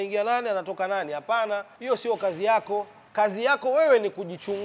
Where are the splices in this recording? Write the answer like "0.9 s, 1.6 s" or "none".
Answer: 1.7 s, 3.0 s